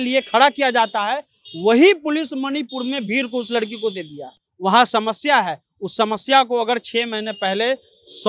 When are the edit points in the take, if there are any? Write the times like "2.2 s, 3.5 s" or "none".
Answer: 4.5 s